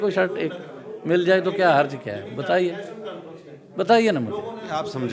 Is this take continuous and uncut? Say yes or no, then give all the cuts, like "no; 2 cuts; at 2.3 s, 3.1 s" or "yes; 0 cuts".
yes; 0 cuts